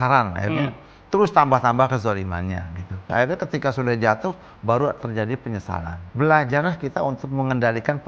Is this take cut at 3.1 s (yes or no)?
yes